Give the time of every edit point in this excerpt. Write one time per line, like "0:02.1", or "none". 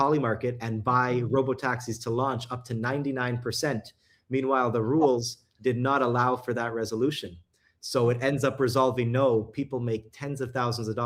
none

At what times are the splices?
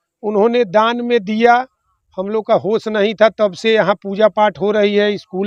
none

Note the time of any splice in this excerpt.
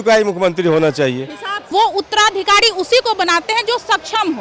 0:01.5

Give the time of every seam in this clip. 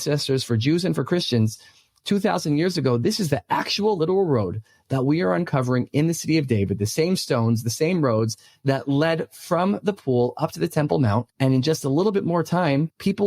0:11.3

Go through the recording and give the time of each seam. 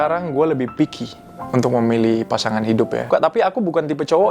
0:03.1

